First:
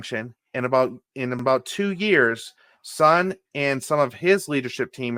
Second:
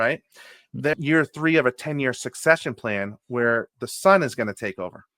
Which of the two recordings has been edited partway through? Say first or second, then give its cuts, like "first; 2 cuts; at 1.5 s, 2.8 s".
second; 1 cut; at 1.0 s